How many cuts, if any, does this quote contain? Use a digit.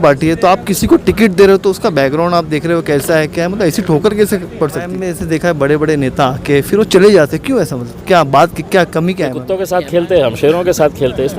2